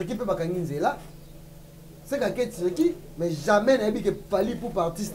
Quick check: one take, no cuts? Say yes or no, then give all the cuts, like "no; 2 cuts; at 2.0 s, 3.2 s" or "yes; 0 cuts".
yes; 0 cuts